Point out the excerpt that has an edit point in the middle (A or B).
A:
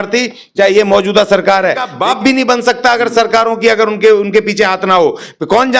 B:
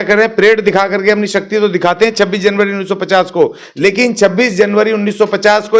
A